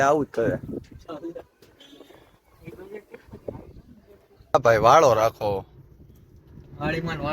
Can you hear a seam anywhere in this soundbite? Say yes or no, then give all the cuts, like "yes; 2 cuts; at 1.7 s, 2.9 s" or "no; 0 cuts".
yes; 1 cut; at 4.5 s